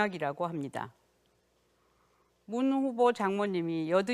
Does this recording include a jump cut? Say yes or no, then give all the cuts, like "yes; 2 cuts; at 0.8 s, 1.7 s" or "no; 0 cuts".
no; 0 cuts